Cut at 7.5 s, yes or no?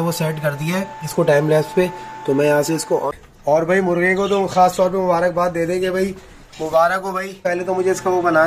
yes